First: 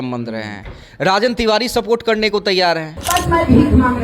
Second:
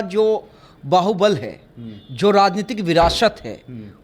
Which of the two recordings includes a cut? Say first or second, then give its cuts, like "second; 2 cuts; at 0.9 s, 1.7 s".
first; 1 cut; at 2.9 s